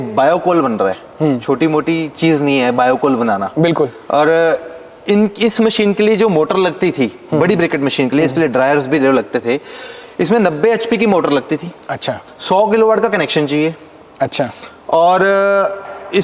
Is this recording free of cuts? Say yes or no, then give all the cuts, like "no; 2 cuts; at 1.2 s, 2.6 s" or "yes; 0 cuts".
yes; 0 cuts